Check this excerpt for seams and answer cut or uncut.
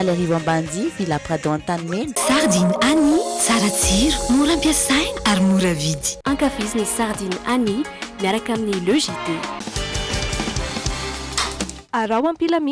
cut